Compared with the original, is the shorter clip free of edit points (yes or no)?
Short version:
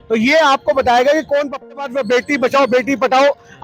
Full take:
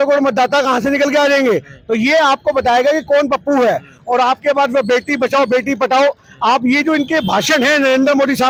no